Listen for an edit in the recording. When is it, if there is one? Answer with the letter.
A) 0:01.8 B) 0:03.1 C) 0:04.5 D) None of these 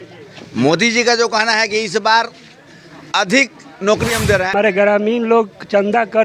C